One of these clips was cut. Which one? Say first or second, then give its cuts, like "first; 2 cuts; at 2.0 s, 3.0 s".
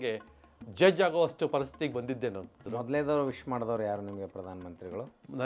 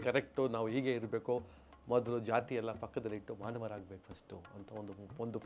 first; 1 cut; at 2.6 s